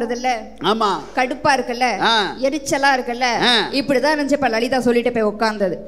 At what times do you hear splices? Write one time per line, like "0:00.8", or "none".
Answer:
none